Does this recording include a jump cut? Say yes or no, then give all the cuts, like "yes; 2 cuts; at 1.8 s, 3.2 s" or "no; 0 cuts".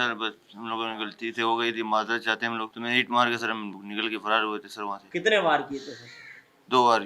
yes; 2 cuts; at 2.7 s, 5.0 s